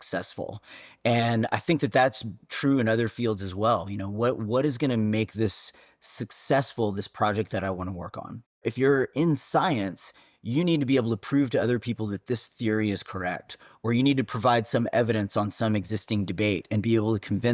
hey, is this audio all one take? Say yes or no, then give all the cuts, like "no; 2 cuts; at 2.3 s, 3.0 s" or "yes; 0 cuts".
no; 1 cut; at 8.6 s